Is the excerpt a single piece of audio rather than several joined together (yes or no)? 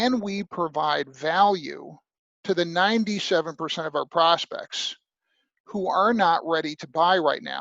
yes